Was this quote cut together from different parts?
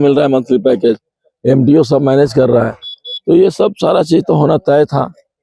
no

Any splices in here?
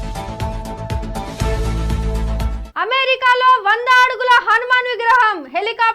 yes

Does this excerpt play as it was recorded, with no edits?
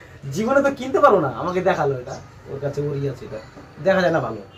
yes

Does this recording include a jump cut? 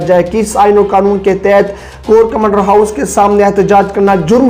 no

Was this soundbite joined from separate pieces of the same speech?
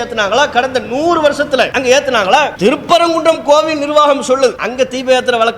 yes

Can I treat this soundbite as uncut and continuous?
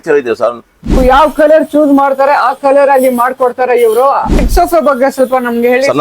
no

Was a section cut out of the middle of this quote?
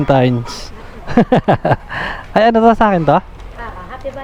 no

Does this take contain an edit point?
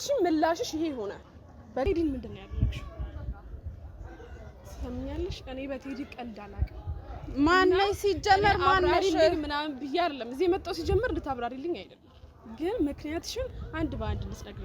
yes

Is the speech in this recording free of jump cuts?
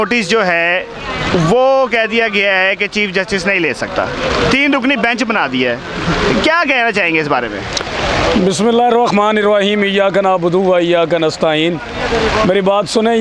yes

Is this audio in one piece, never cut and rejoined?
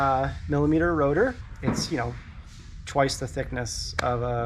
no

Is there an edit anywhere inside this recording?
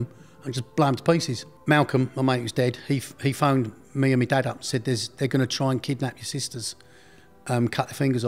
yes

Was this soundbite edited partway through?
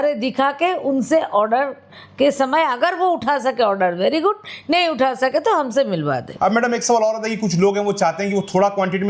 yes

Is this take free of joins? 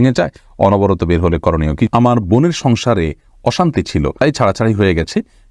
no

